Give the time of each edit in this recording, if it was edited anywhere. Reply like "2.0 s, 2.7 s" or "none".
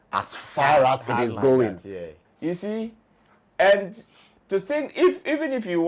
2.2 s